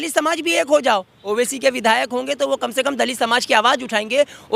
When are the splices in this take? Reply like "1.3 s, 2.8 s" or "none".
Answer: 1.3 s